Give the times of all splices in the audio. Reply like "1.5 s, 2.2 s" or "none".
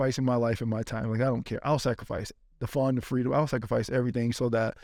none